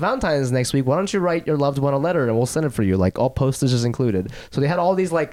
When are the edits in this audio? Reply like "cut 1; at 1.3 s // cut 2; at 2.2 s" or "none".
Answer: none